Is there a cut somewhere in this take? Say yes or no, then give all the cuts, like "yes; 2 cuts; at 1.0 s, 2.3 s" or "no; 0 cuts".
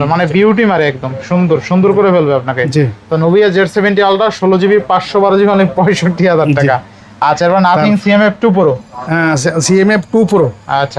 no; 0 cuts